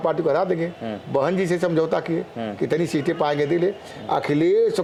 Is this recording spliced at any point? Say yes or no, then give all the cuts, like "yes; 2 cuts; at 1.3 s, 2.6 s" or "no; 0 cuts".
no; 0 cuts